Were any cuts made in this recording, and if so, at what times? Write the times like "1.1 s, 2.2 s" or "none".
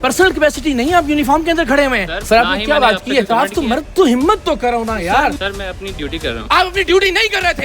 2.1 s, 5.4 s